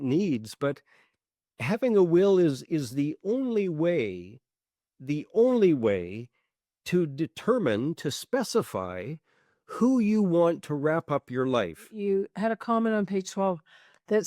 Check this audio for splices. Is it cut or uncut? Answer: cut